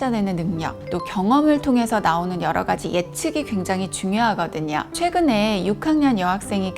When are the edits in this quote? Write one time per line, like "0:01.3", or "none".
0:04.9